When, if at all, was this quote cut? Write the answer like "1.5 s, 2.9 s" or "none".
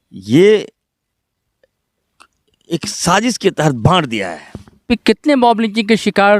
4.8 s